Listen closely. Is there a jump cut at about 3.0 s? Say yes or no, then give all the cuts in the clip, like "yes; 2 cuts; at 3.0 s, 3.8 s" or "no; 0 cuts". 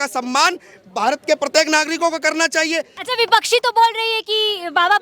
yes; 1 cut; at 3.0 s